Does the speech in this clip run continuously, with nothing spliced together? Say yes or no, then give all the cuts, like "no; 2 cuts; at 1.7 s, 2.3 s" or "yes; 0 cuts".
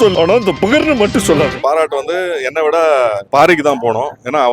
no; 2 cuts; at 1.6 s, 3.2 s